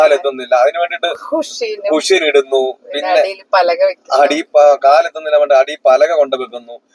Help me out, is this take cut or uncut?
uncut